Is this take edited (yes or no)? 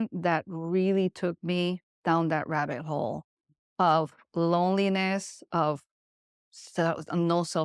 no